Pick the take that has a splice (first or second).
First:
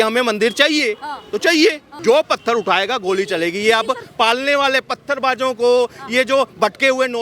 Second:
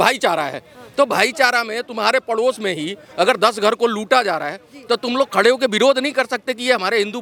first